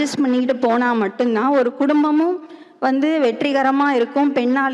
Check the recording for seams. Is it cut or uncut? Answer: uncut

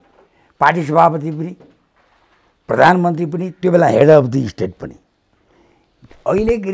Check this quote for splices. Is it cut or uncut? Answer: uncut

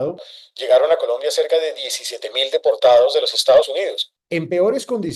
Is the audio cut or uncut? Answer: uncut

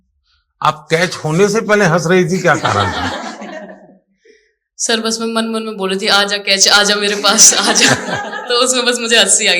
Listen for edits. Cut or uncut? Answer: uncut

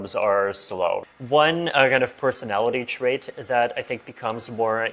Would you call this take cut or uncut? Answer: cut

